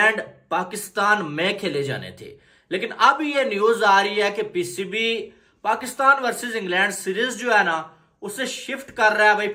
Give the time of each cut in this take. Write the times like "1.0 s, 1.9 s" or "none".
none

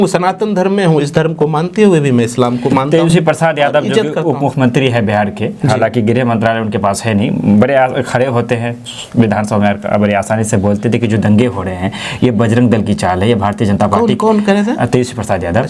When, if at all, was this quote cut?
none

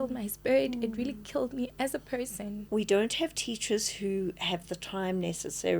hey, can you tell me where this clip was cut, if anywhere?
2.5 s

